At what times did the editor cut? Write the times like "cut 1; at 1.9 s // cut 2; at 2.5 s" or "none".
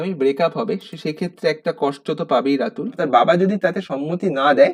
cut 1; at 3.0 s